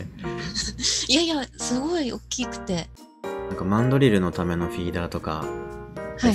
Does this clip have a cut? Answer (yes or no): yes